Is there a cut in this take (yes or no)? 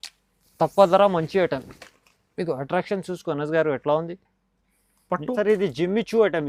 yes